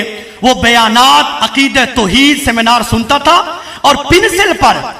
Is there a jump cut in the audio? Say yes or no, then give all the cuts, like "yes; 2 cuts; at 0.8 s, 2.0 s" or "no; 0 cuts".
no; 0 cuts